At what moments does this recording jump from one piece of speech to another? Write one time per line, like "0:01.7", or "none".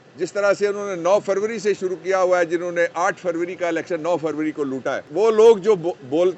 0:05.0